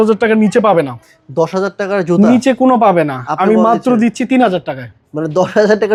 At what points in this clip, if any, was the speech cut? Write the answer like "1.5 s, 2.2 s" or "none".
none

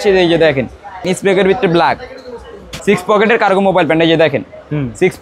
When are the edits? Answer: 1.0 s, 2.7 s

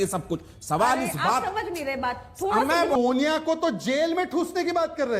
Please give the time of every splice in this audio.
2.9 s

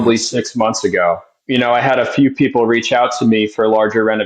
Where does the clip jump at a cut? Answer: 1.3 s

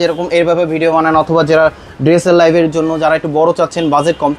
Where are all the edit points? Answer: none

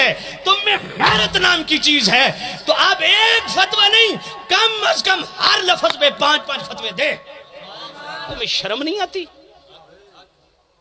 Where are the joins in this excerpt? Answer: 8.4 s

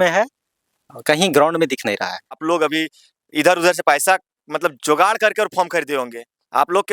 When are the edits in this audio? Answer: 2.4 s

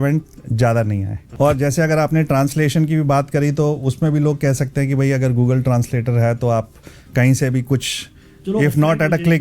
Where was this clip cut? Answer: 1.3 s

